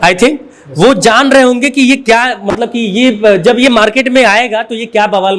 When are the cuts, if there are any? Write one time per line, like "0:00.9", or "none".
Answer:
none